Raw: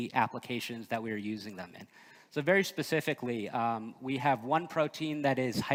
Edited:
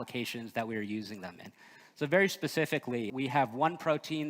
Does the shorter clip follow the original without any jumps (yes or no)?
no